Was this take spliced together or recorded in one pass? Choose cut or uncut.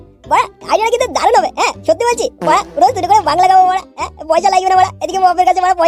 uncut